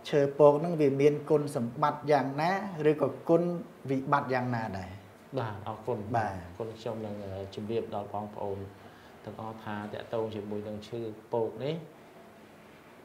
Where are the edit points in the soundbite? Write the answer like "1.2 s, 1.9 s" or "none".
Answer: none